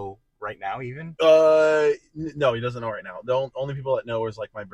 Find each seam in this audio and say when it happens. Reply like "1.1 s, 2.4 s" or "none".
1.0 s

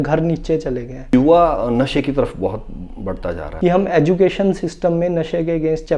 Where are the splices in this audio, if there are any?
1.1 s, 3.5 s

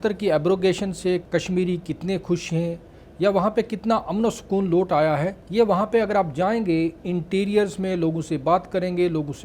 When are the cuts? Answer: 1.2 s, 5.4 s

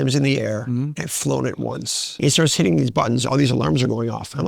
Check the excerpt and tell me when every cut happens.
2.1 s

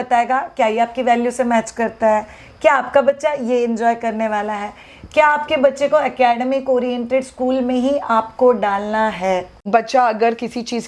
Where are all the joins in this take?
9.6 s

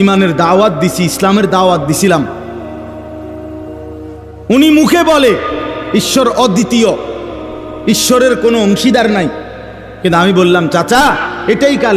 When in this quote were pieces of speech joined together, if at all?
2.3 s, 3.9 s

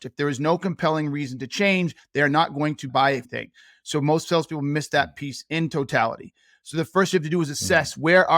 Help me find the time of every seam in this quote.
2.9 s

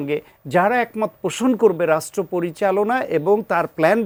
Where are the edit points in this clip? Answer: none

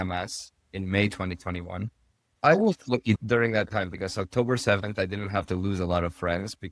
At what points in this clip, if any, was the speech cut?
none

